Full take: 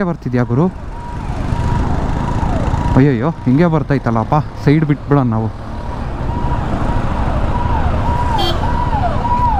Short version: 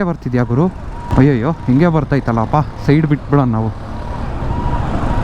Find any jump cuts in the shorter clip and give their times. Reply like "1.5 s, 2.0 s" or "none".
1.1 s